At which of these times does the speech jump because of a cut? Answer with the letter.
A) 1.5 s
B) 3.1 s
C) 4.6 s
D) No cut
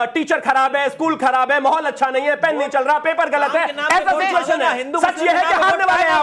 D